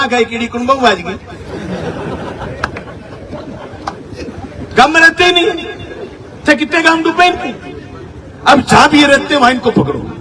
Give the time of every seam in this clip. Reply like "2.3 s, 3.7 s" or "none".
none